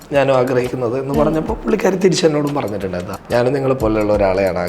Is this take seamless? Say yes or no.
no